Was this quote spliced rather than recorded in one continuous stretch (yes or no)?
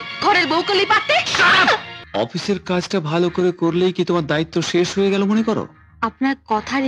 yes